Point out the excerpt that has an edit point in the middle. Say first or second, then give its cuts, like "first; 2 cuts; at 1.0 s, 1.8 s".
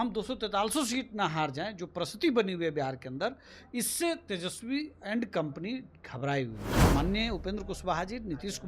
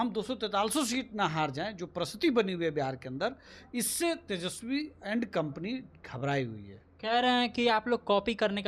first; 1 cut; at 6.7 s